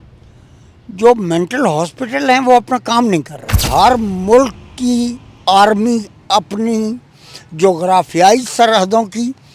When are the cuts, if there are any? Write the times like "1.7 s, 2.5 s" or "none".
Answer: 3.7 s